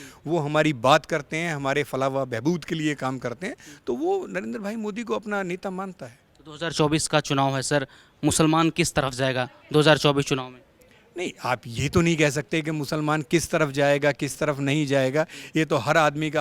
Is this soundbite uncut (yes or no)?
yes